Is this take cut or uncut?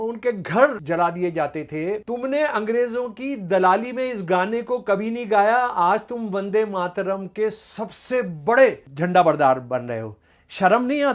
cut